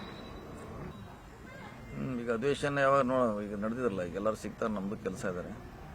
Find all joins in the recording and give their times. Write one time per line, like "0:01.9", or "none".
0:00.9